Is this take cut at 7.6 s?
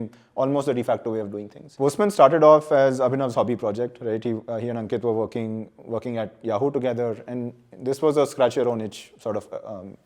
no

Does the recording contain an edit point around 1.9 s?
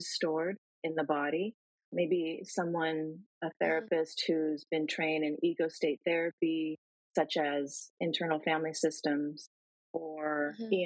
yes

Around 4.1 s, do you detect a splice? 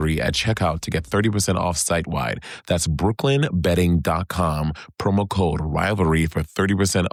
no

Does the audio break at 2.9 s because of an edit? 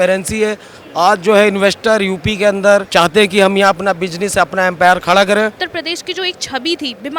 yes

